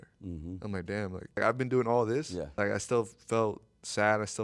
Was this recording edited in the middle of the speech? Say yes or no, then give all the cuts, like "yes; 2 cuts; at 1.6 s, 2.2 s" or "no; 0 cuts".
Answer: yes; 2 cuts; at 1.4 s, 2.6 s